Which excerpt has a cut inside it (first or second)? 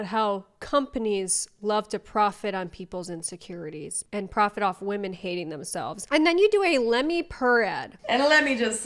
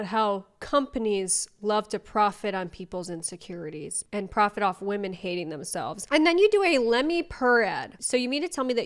first